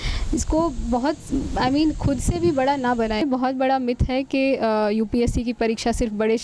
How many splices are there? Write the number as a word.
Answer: one